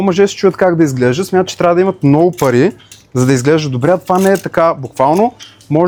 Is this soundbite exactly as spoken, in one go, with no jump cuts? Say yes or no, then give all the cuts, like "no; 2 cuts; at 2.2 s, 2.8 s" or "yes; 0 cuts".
yes; 0 cuts